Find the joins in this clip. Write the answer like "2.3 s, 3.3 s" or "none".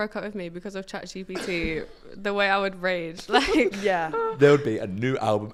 none

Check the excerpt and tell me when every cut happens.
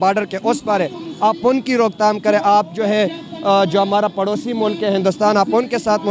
none

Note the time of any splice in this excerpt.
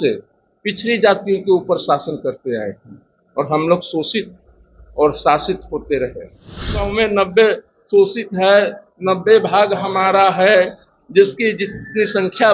6.9 s

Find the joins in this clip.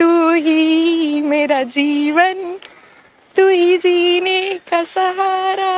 none

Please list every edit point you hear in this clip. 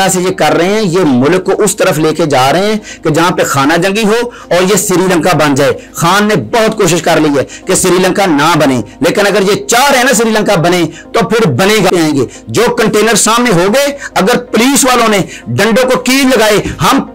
11.9 s

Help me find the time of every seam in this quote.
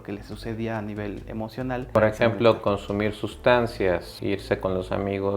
2.0 s

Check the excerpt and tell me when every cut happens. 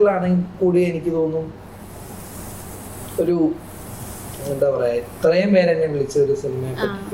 none

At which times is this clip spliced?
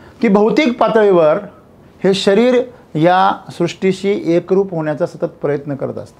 none

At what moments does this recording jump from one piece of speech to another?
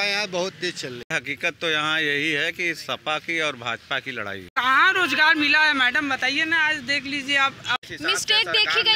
1.1 s, 4.5 s, 7.9 s

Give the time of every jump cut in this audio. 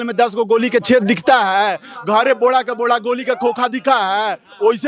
none

